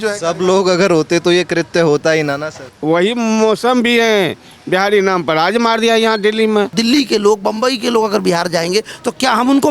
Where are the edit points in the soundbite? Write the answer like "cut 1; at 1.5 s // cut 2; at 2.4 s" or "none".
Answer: cut 1; at 2.6 s // cut 2; at 6.7 s